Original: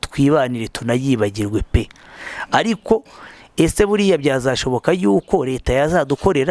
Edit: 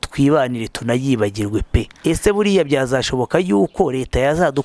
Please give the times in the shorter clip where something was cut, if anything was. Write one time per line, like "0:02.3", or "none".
0:01.9